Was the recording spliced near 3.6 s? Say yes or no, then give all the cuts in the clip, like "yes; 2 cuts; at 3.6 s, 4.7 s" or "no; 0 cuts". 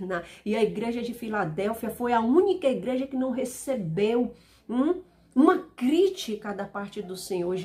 no; 0 cuts